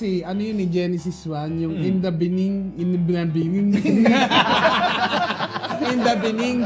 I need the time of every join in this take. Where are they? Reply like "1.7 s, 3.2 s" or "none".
none